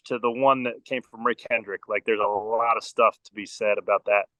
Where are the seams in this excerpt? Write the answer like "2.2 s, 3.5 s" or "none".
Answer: none